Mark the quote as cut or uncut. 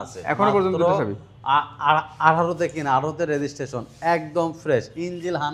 uncut